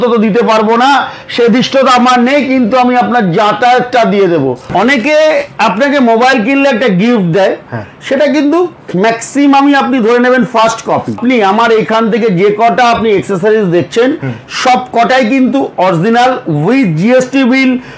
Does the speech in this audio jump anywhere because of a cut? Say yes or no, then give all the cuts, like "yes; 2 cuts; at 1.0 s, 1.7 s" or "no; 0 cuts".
yes; 2 cuts; at 4.6 s, 11.2 s